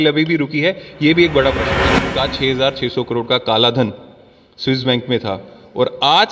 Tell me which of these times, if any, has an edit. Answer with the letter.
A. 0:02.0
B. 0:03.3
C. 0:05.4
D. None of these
A